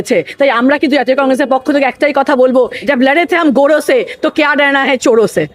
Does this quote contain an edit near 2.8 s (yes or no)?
yes